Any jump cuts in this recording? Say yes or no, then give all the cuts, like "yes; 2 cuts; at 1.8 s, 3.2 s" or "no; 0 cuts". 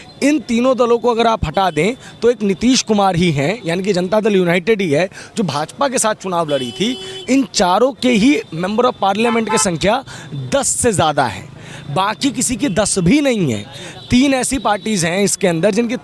no; 0 cuts